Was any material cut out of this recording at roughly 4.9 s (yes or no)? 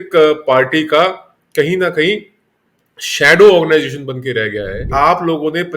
yes